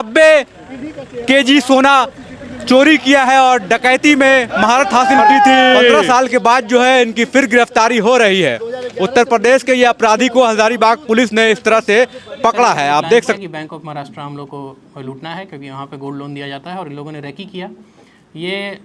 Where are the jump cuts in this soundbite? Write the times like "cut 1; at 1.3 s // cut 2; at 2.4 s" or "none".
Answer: cut 1; at 5.8 s // cut 2; at 13.4 s